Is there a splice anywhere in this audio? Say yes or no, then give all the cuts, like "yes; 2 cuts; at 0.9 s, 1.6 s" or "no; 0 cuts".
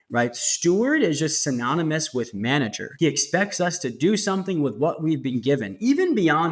yes; 1 cut; at 2.8 s